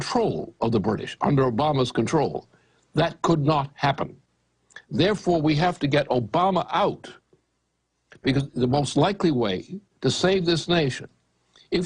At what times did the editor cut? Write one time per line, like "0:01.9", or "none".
0:06.7